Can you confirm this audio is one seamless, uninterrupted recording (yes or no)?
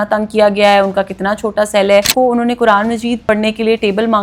no